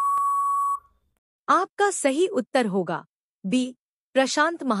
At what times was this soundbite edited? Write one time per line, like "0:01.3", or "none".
0:01.0